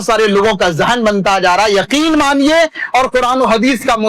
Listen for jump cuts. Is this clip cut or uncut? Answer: uncut